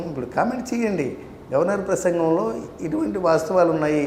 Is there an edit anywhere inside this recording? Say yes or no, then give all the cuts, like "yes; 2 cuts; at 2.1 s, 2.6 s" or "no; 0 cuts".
no; 0 cuts